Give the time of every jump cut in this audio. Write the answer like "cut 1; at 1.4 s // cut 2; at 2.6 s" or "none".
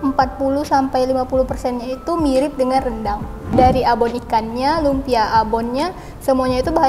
cut 1; at 3.5 s